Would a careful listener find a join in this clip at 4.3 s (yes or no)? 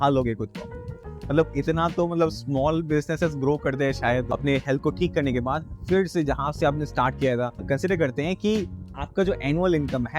yes